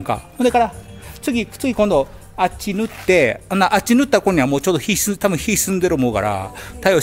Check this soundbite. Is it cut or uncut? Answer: cut